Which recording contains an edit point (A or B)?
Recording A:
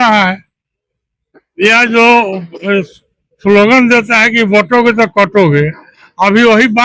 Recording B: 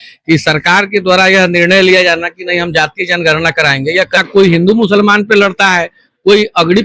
B